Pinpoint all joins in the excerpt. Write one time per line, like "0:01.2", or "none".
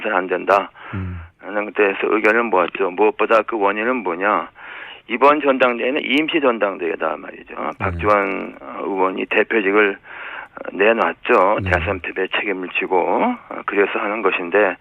0:07.0